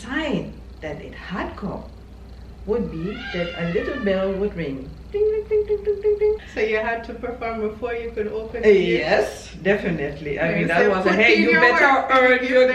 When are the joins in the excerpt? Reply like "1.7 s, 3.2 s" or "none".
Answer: 6.5 s